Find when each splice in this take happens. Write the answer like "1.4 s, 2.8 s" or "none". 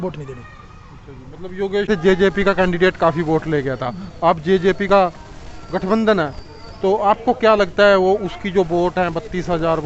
1.9 s